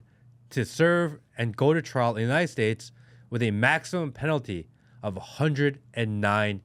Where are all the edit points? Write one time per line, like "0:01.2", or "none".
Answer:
none